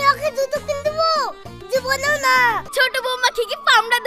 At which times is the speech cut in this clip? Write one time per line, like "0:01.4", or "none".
0:02.7